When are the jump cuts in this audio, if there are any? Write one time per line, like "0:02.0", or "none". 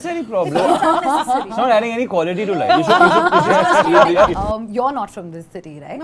0:04.3